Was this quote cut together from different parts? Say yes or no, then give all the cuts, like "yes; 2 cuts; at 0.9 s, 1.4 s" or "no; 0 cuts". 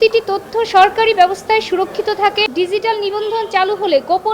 yes; 1 cut; at 2.5 s